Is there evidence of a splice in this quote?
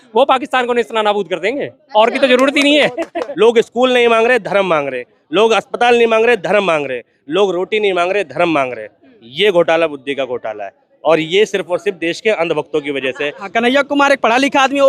yes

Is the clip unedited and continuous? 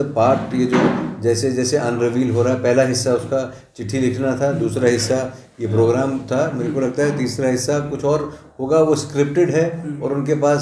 yes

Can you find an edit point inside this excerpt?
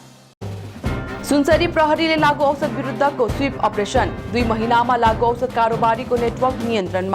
yes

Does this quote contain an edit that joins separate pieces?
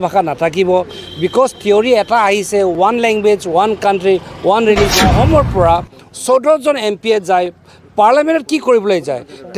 yes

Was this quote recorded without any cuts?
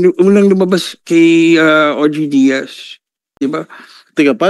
no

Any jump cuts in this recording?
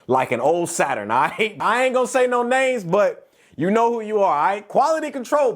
yes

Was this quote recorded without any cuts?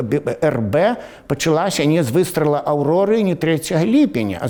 yes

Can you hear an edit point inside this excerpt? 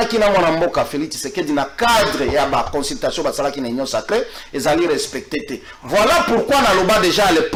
no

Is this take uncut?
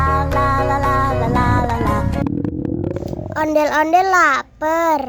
no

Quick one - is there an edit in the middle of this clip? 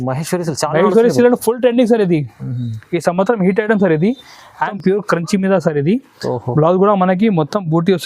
yes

